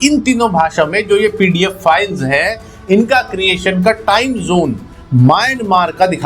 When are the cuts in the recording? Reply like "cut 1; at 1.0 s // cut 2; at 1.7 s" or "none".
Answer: none